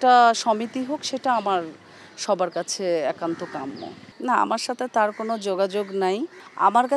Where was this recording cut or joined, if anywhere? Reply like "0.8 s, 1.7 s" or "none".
none